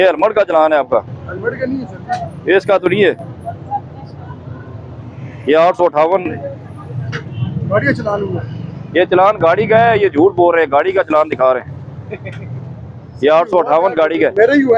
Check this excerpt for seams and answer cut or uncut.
uncut